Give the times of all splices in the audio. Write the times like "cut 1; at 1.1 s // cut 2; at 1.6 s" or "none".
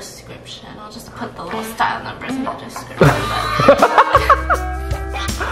none